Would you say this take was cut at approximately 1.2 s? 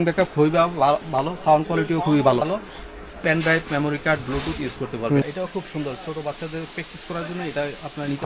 no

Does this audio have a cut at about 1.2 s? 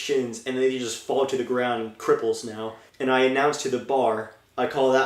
no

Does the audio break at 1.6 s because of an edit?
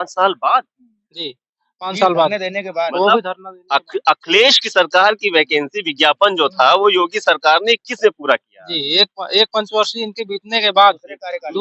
no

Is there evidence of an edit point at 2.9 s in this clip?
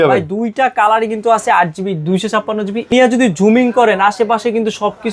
yes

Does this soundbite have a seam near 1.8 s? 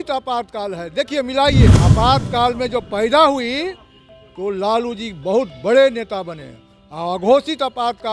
yes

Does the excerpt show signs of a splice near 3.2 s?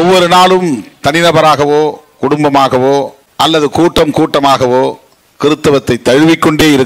yes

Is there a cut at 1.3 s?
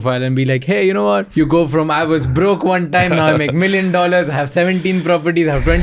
yes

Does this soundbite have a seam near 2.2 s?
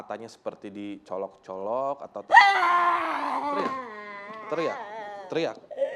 yes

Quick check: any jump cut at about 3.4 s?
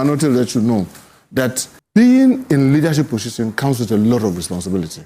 no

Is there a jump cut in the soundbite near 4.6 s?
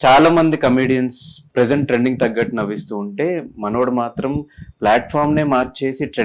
no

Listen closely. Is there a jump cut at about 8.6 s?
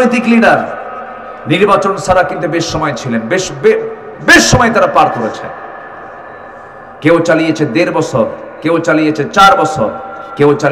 no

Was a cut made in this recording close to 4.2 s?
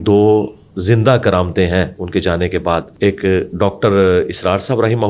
no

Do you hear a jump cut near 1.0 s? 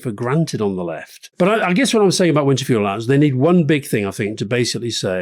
no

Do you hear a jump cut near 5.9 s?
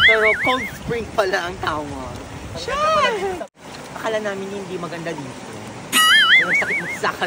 no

